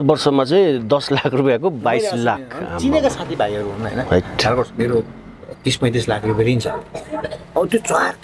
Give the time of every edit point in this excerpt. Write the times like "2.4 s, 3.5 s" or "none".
4.7 s